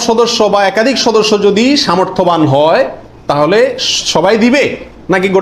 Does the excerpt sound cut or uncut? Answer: uncut